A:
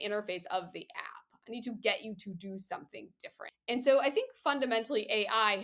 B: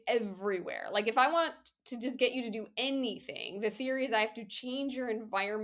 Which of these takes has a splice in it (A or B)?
A